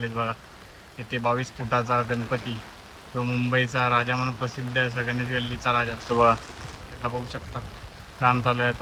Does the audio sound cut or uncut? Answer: uncut